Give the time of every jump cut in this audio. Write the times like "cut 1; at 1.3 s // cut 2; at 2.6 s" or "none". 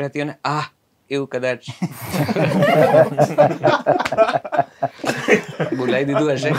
none